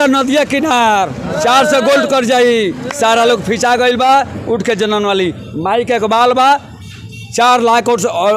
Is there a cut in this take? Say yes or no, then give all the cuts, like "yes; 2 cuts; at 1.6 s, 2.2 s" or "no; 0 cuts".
no; 0 cuts